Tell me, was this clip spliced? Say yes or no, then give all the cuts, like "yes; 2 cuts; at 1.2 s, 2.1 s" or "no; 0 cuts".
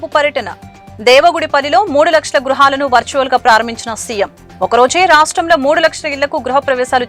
no; 0 cuts